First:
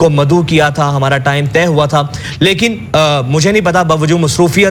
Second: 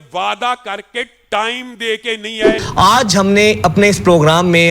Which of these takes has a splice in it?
second; 1 cut; at 2.6 s

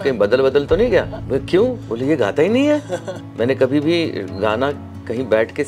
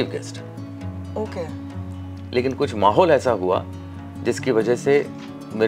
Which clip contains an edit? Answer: first; 2 cuts; at 1.2 s, 3.2 s

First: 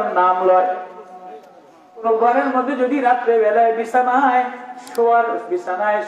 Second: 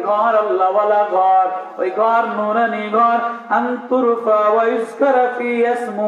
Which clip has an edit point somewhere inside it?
first; 1 cut; at 2.0 s

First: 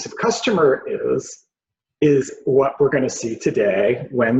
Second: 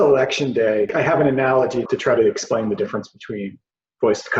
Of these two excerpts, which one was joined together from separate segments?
second; 2 cuts; at 0.9 s, 1.8 s

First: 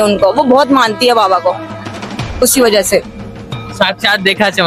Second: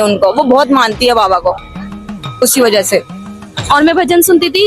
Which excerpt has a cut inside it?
second; 1 cut; at 3.5 s

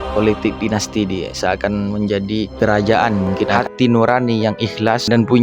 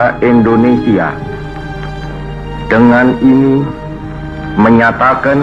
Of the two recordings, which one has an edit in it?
first; 1 cut; at 3.6 s

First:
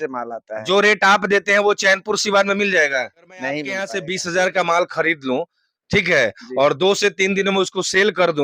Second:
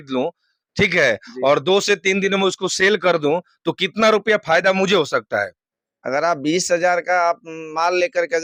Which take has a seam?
first; 1 cut; at 3.9 s

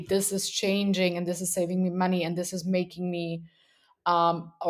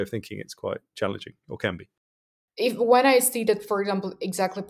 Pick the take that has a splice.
second; 1 cut; at 2.4 s

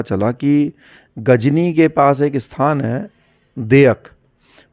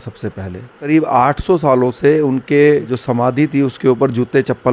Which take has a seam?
second; 2 cuts; at 0.9 s, 2.9 s

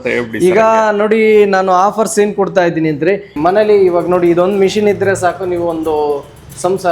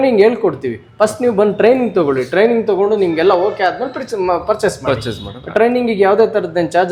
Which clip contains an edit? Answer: first; 1 cut; at 3.3 s

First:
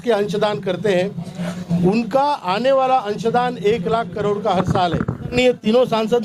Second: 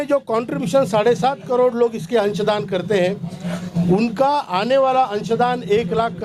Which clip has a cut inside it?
first; 1 cut; at 5.3 s

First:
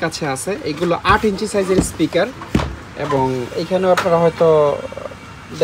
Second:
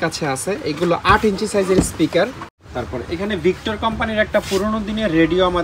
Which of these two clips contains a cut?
second; 1 cut; at 2.4 s

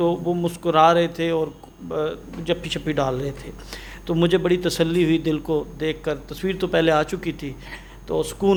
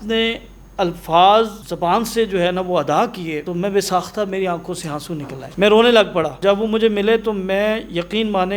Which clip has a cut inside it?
second; 4 cuts; at 1.6 s, 3.4 s, 5.4 s, 6.3 s

